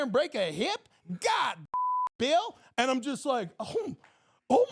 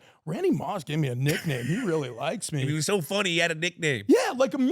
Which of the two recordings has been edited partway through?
second; 1 cut; at 2.7 s

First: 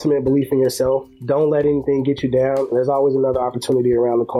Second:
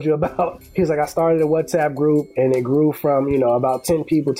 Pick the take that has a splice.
first; 1 cut; at 2.7 s

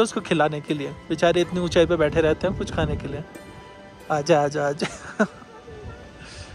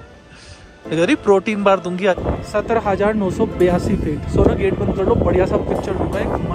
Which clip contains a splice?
second; 1 cut; at 2.2 s

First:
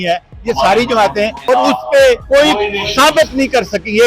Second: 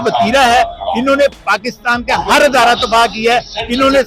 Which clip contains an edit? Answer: first; 2 cuts; at 1.4 s, 2.2 s

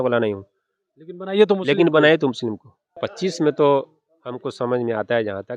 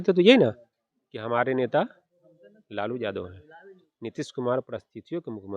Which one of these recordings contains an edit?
first; 1 cut; at 3.1 s

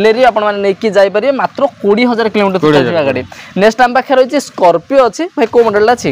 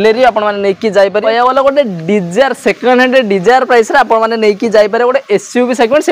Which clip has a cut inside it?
second; 1 cut; at 1.2 s

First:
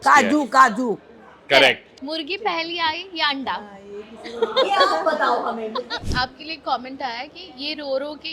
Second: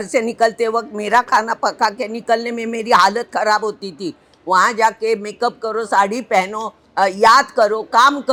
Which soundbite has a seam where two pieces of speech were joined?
first; 2 cuts; at 1.9 s, 6.0 s

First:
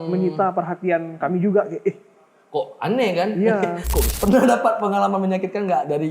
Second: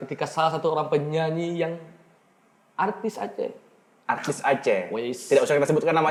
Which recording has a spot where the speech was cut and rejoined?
first; 1 cut; at 4.1 s

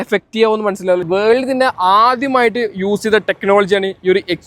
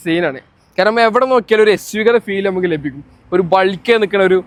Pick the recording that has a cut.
first; 1 cut; at 1.1 s

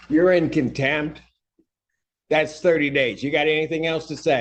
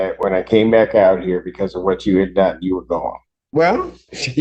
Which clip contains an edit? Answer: second; 1 cut; at 3.3 s

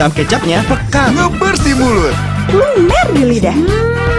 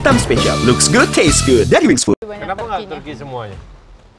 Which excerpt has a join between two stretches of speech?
second; 1 cut; at 2.2 s

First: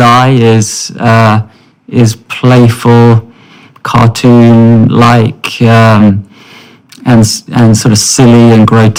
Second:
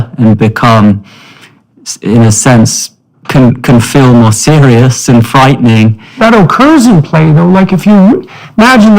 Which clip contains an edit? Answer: second; 1 cut; at 6.2 s

